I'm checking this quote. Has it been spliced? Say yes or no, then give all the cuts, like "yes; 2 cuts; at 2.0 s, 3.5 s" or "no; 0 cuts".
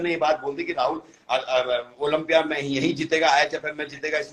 no; 0 cuts